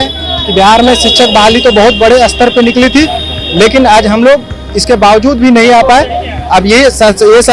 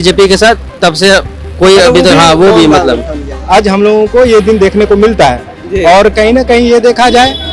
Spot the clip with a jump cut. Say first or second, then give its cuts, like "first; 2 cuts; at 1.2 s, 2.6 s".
second; 1 cut; at 3.2 s